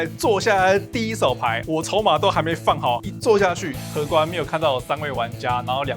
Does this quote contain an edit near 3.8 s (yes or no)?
yes